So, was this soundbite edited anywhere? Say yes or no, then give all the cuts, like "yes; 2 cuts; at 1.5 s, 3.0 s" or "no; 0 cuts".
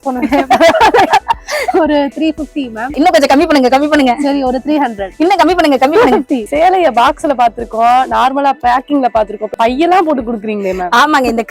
yes; 4 cuts; at 2.9 s, 5.0 s, 6.5 s, 9.5 s